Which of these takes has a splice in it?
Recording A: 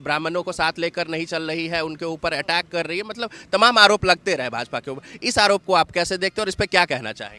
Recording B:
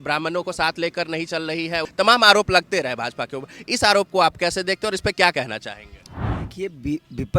B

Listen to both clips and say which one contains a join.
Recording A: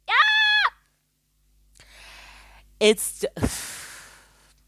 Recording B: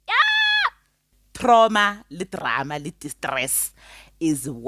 B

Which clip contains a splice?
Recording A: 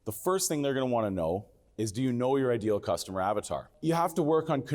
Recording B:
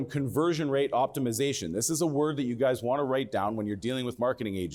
A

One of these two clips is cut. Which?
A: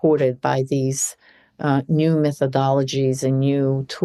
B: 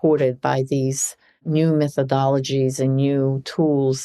B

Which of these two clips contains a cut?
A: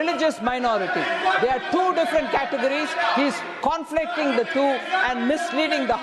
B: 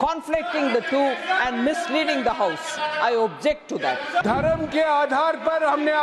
B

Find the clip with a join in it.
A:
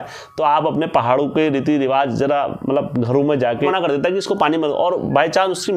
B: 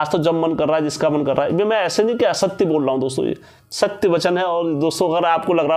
A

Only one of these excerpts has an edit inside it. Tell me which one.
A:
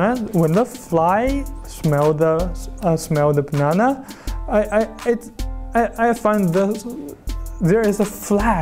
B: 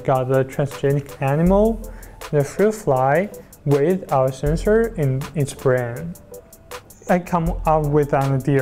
B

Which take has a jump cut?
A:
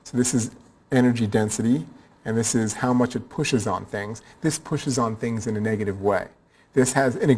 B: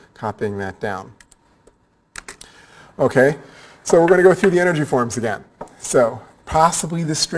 A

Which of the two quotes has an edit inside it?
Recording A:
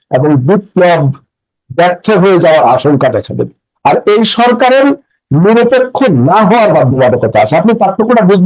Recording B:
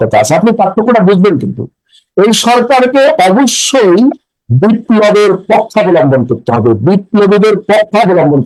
A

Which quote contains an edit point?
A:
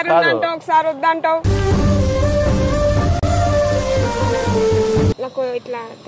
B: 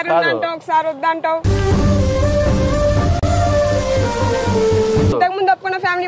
A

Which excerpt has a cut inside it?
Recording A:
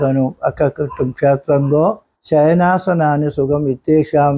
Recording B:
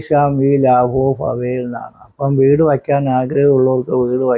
A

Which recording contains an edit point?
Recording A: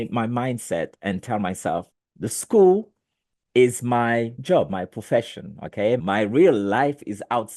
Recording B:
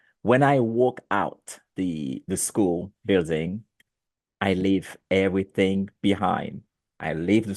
A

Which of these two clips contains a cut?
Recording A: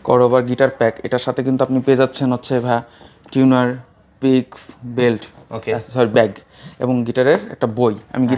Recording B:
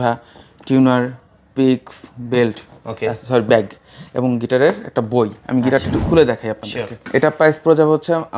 B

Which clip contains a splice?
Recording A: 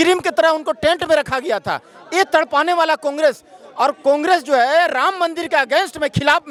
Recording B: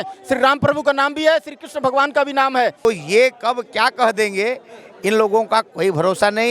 B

